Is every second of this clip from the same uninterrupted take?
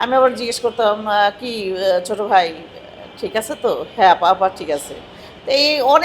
yes; 0 cuts

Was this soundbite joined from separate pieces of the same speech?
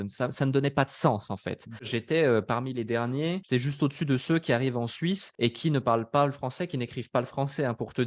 yes; 3 cuts; at 2.0 s, 3.4 s, 5.3 s

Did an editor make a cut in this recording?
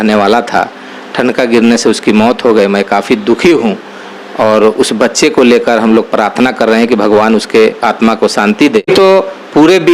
yes; 1 cut; at 8.9 s

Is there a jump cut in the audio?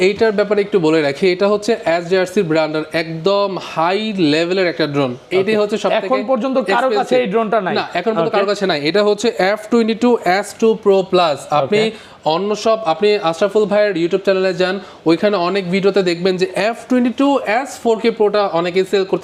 no; 0 cuts

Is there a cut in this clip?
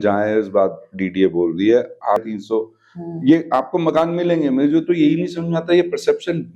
yes; 1 cut; at 2.3 s

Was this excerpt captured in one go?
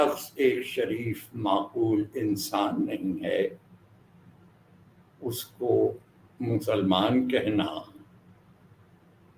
yes; 0 cuts

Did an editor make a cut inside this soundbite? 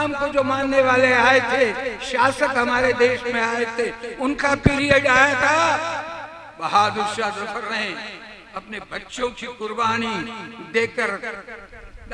no; 0 cuts

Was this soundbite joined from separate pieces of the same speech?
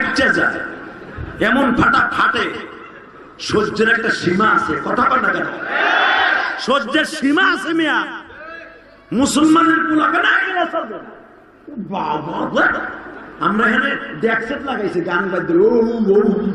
no; 0 cuts

